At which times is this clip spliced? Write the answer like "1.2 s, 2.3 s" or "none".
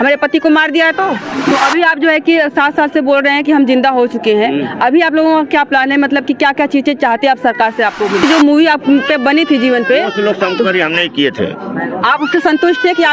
1.3 s, 8.2 s